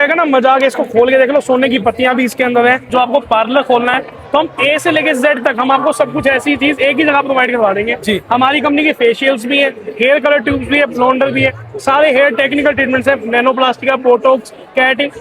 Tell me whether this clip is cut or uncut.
cut